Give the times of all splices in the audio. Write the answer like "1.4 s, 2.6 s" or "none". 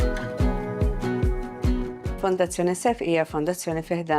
2.1 s